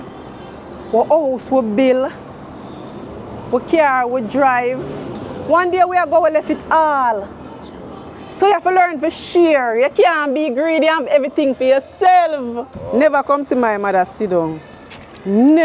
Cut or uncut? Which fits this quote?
cut